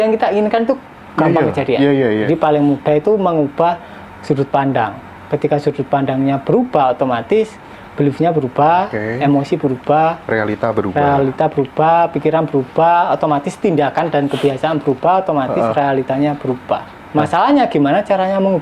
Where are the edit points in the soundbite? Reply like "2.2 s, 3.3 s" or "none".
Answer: 2.3 s